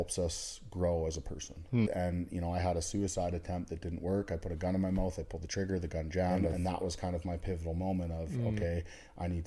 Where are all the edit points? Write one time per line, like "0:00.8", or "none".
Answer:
0:01.9
0:06.5